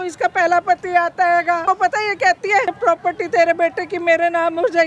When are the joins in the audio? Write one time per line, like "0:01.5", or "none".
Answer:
0:01.6
0:02.7